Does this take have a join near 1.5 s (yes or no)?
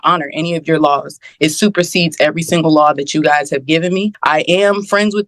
no